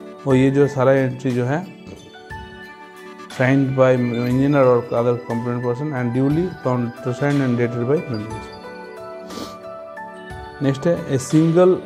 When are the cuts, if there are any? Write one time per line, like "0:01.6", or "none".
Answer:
none